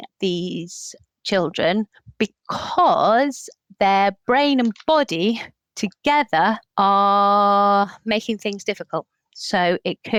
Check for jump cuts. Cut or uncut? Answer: uncut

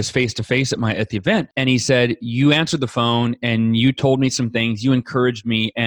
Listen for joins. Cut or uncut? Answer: cut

